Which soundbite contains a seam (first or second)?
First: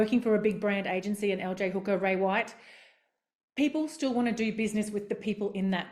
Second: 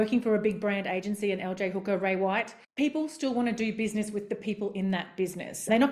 second